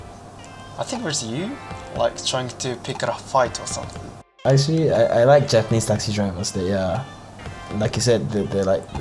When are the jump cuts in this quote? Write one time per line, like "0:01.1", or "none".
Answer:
0:04.4